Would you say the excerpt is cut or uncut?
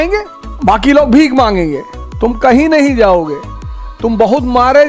uncut